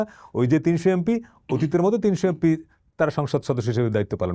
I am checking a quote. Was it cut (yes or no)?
no